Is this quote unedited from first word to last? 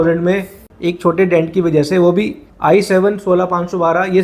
yes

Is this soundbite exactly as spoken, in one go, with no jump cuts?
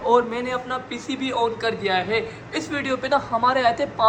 yes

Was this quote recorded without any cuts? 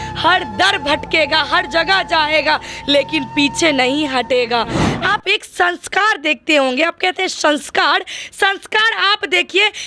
no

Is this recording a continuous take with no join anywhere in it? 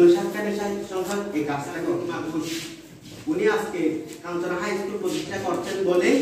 no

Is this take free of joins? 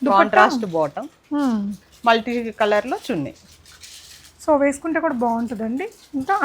yes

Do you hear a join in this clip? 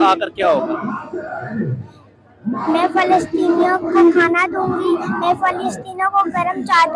no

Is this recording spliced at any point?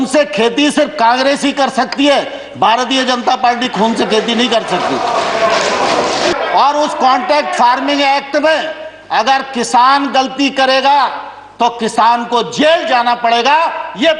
yes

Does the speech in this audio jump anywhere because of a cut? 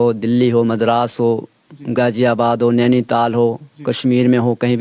no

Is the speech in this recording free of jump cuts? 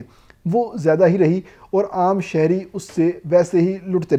yes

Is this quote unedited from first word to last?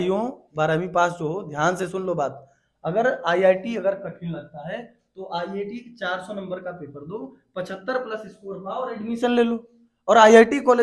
yes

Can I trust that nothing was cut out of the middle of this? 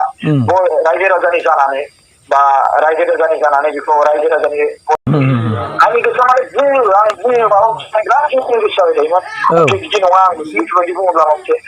no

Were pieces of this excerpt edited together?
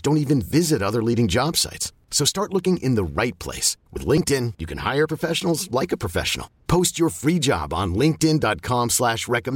no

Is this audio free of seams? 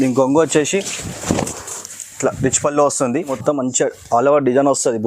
no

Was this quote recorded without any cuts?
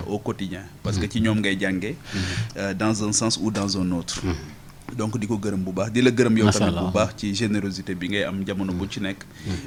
yes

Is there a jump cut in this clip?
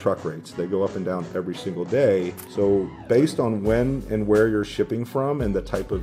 no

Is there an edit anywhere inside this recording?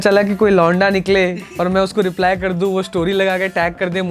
no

